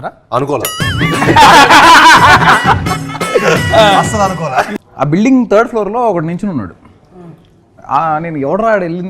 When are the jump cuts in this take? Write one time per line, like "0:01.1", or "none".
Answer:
0:04.7